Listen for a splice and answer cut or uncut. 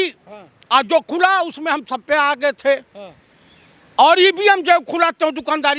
uncut